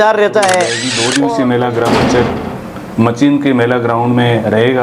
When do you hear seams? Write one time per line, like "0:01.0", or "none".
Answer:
0:01.0